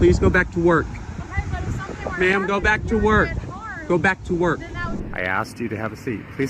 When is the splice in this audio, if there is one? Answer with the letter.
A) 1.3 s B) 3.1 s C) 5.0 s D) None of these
C